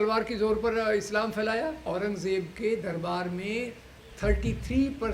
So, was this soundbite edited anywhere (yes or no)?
yes